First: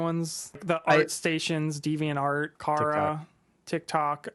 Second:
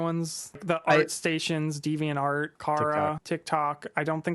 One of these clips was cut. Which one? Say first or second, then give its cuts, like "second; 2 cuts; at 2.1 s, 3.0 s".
second; 1 cut; at 3.2 s